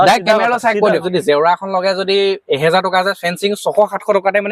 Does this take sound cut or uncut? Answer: cut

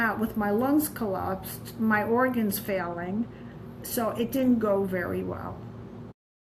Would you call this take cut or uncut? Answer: uncut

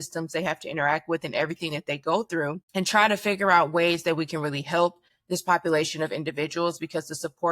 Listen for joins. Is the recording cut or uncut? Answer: cut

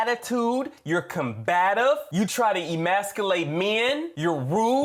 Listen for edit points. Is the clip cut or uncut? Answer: uncut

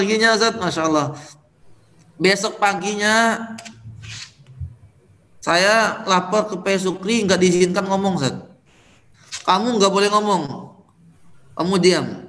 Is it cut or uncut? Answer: uncut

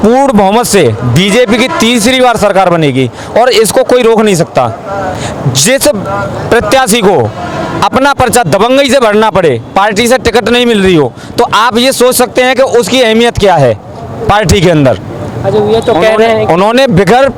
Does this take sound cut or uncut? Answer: uncut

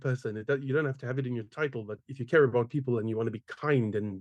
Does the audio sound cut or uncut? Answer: uncut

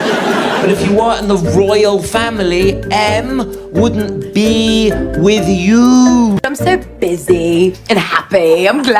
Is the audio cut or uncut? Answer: cut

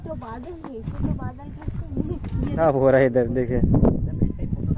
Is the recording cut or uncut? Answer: cut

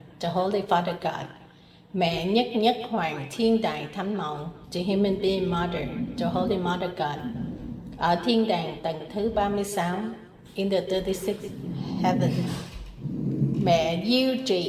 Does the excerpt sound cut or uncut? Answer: uncut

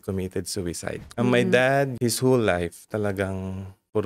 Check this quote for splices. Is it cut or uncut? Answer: cut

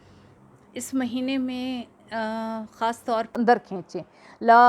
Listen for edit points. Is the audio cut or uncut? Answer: cut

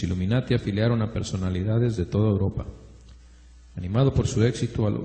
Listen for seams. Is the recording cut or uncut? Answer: uncut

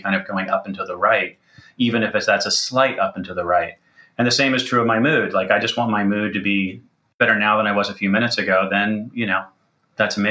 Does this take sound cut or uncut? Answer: cut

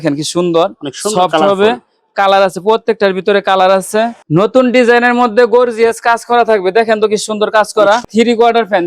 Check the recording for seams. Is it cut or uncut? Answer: cut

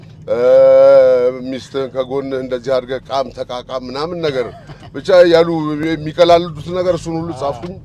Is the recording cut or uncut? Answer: uncut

